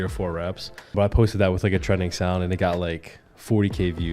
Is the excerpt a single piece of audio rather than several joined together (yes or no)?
no